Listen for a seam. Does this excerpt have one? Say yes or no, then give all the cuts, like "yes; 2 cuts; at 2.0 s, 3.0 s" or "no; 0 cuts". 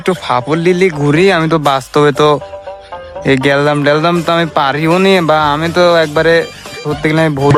no; 0 cuts